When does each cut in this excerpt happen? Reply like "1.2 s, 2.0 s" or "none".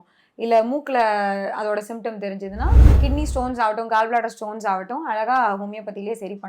2.9 s